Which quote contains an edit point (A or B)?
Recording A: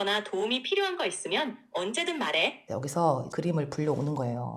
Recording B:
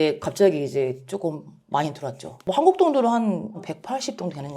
A